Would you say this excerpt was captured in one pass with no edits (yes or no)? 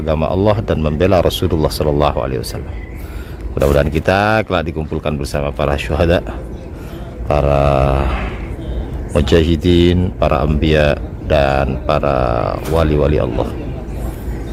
yes